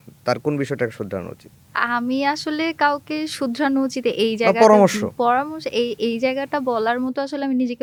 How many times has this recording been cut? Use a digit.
0